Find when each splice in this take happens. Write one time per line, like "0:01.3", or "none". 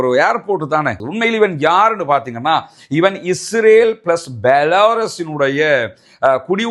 0:01.0